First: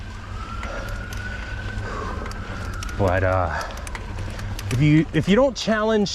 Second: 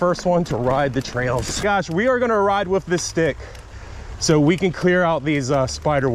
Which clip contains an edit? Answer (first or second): second